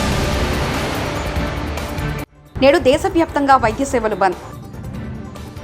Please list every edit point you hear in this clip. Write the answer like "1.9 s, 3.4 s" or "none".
2.4 s